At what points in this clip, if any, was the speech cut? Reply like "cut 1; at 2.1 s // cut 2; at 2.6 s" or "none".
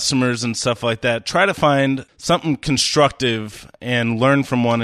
cut 1; at 2.1 s